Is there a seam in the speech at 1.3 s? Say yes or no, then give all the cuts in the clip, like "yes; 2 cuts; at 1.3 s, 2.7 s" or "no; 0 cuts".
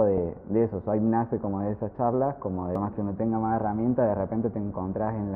no; 1 cut; at 2.8 s